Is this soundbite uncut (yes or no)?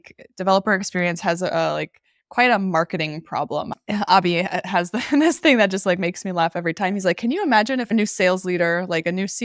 no